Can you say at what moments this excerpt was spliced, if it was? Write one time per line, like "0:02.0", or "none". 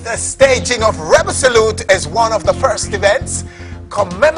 none